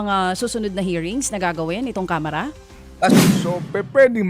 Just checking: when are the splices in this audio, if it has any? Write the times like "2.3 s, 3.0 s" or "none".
3.1 s